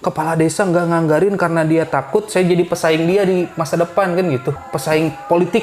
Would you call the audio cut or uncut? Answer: cut